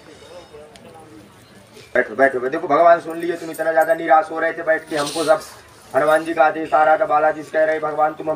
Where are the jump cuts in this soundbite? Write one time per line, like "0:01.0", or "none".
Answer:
0:02.0